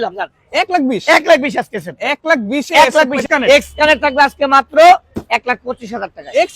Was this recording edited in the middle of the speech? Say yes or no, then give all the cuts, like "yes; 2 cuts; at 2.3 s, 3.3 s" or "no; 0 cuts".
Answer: yes; 1 cut; at 3.2 s